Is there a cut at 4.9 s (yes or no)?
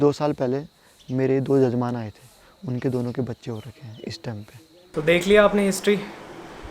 yes